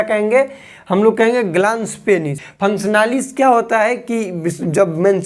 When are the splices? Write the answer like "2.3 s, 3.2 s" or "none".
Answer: 2.4 s